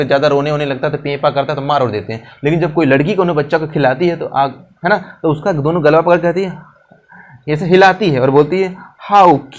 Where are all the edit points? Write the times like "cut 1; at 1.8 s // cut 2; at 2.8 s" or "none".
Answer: none